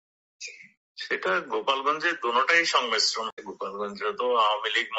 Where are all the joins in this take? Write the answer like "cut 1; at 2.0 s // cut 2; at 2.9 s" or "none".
cut 1; at 3.3 s

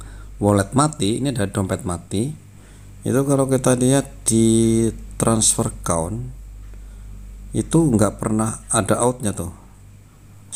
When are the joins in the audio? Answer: none

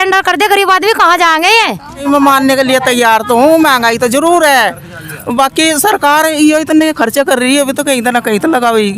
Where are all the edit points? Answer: cut 1; at 2.0 s

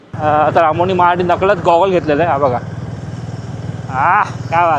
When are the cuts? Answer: none

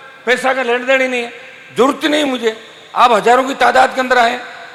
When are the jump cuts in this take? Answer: none

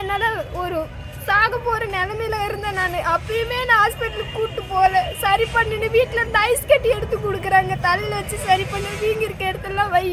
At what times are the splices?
none

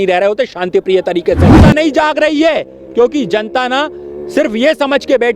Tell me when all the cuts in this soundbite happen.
cut 1; at 1.5 s

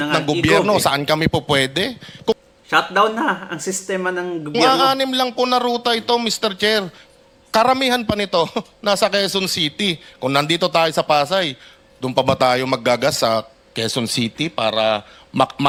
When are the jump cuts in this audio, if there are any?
none

